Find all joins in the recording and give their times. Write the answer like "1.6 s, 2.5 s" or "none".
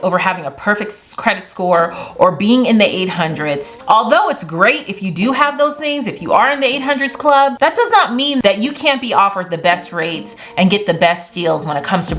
3.7 s, 8.4 s